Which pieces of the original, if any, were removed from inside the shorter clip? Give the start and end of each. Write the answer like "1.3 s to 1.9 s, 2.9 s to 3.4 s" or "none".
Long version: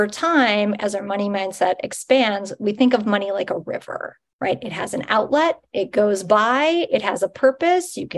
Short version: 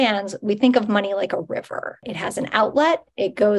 4.3 s to 4.7 s